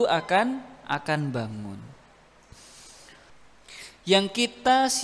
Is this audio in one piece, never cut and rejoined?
no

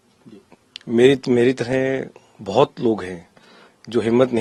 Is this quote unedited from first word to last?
yes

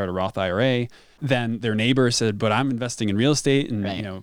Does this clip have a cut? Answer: yes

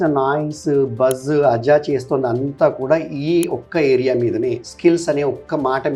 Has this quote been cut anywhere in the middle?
no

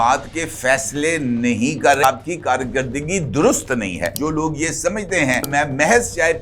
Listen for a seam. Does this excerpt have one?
yes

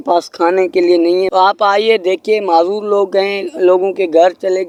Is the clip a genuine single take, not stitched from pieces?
yes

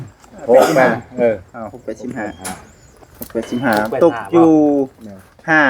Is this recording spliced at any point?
no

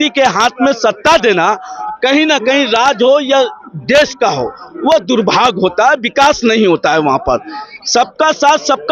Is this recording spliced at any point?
no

